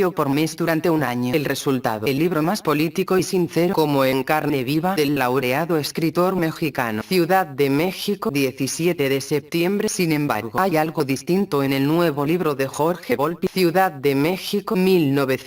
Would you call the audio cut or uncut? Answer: uncut